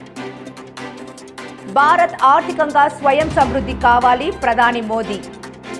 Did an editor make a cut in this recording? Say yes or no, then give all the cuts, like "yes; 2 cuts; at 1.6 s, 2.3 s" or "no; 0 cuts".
yes; 1 cut; at 1.6 s